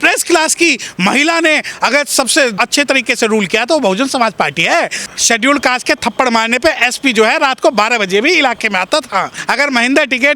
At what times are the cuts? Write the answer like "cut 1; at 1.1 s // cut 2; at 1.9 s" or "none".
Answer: cut 1; at 2.6 s // cut 2; at 5.0 s // cut 3; at 9.4 s